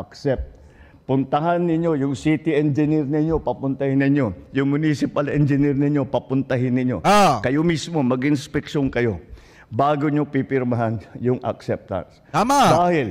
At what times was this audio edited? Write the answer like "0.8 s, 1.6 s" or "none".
none